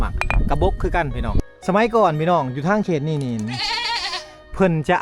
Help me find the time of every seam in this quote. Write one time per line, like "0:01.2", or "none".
0:01.5

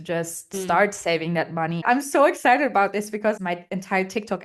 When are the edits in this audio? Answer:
0:01.8
0:03.4

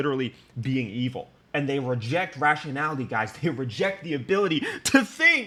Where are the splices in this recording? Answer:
none

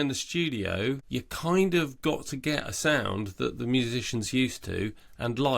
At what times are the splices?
0:01.0

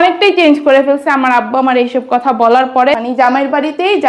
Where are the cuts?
0:02.9

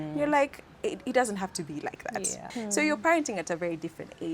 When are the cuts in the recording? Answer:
0:02.5

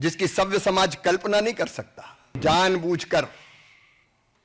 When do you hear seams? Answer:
0:02.4

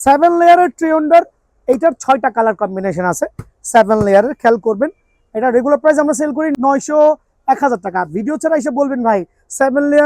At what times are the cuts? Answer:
0:06.5

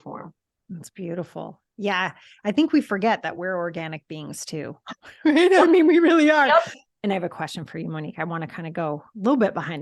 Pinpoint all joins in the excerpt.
0:06.8

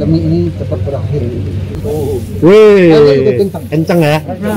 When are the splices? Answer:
0:01.7

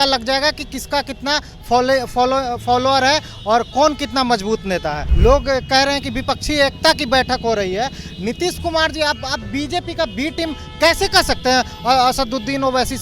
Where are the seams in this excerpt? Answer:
0:05.1

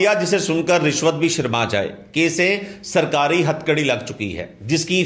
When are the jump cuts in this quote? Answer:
none

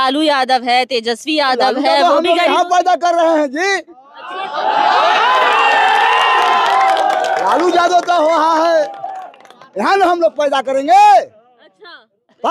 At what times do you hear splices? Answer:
none

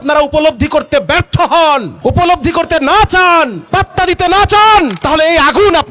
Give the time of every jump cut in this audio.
0:01.9
0:03.6
0:05.0

